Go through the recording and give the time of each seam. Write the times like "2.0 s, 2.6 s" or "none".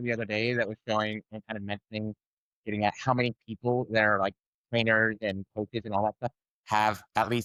none